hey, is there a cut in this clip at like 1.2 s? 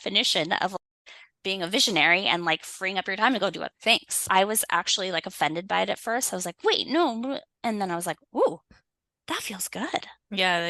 no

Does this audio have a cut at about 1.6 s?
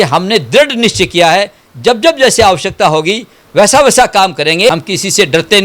no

